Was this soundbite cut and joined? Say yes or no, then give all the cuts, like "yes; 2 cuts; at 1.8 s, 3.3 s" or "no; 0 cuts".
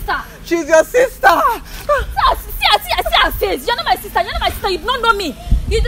no; 0 cuts